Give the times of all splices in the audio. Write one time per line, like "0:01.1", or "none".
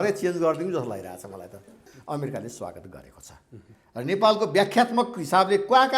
0:01.9